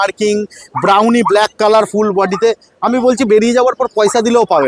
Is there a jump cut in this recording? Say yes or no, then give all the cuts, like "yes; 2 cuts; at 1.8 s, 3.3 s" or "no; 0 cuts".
no; 0 cuts